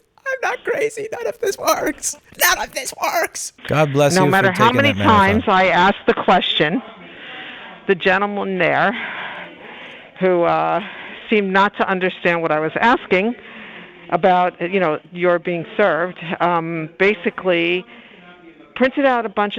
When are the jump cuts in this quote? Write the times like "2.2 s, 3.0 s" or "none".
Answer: 3.5 s